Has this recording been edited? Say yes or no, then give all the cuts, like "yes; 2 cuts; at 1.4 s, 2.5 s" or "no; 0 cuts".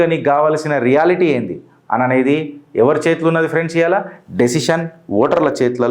no; 0 cuts